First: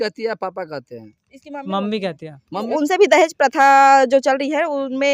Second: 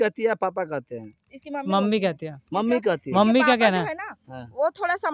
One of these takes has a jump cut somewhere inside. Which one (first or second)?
first